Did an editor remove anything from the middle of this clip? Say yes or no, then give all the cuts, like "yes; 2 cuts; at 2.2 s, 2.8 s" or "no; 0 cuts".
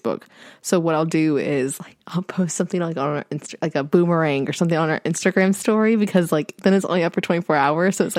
no; 0 cuts